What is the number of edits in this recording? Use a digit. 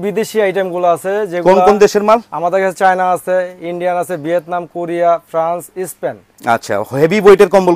0